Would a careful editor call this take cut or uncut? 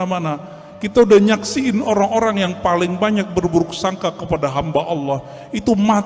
uncut